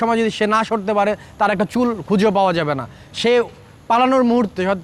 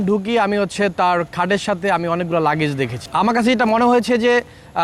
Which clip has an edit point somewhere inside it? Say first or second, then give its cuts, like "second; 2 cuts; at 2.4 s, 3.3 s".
second; 1 cut; at 3.0 s